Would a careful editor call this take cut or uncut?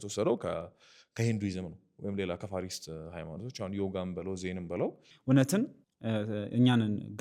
cut